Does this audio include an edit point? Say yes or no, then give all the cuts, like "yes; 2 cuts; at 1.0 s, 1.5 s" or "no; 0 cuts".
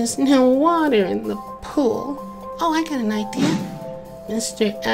yes; 1 cut; at 3.7 s